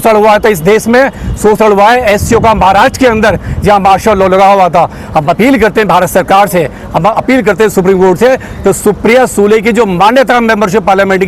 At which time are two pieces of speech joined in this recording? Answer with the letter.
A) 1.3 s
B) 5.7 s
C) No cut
C